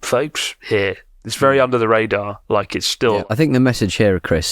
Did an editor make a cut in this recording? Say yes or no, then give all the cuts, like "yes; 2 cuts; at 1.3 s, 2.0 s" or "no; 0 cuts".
yes; 1 cut; at 3.2 s